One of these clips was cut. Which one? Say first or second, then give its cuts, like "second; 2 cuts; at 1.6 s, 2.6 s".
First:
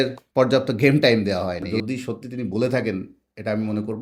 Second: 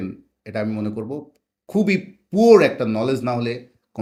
first; 1 cut; at 1.7 s